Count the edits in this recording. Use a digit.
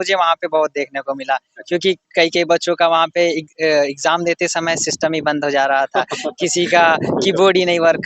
0